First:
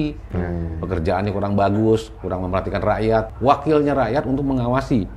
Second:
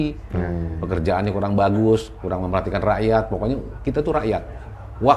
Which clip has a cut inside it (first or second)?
first